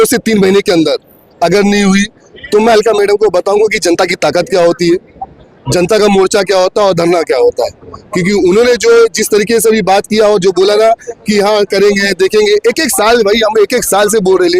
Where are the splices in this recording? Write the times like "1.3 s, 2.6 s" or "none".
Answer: none

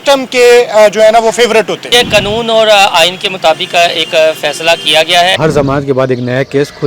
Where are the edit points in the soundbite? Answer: 1.9 s, 5.4 s

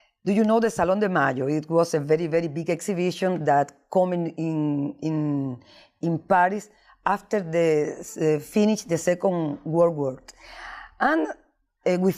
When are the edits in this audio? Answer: 11.0 s

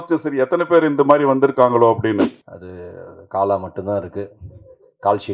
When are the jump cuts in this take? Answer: 2.3 s

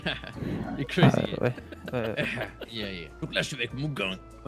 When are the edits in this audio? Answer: 3.1 s

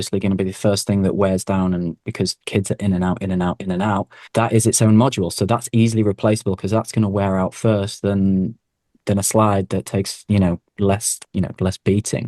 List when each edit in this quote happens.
4.2 s

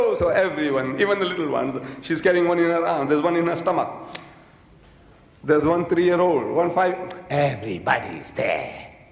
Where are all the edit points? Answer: 7.6 s

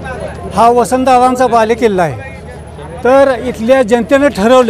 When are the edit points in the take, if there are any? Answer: none

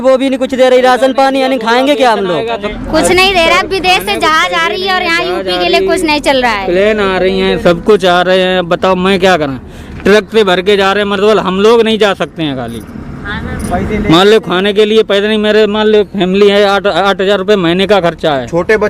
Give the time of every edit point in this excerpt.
2.7 s

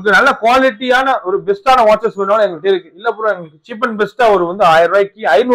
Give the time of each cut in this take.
none

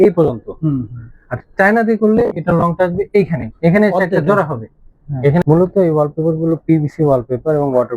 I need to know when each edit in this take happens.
5.4 s

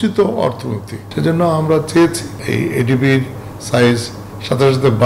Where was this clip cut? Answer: 1.1 s, 2.3 s

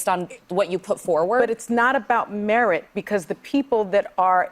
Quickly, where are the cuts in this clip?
none

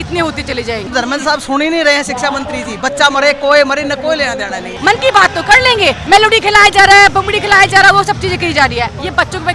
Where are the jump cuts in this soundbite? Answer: 0.9 s, 4.7 s, 6.0 s

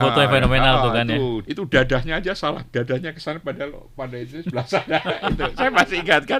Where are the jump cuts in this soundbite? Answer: 1.4 s

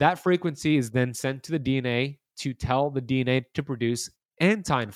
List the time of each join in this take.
none

